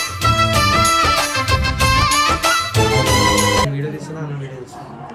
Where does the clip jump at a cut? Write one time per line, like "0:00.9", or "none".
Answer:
none